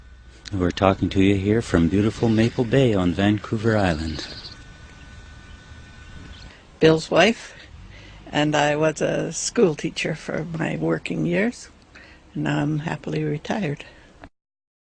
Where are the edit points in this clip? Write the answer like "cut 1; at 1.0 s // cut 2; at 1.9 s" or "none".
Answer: cut 1; at 13.7 s